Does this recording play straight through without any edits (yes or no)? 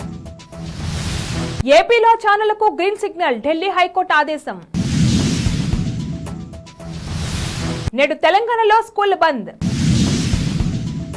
yes